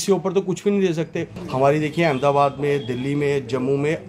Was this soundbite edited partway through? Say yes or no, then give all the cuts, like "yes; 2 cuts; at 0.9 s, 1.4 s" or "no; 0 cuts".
yes; 1 cut; at 1.4 s